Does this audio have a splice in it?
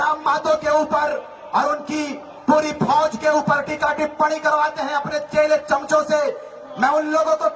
no; 0 cuts

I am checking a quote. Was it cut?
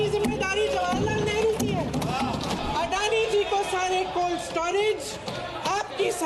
yes; 1 cut; at 2.6 s

